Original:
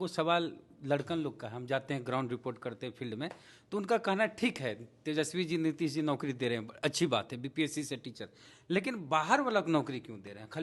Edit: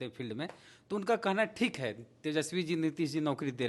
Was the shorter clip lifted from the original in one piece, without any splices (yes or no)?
yes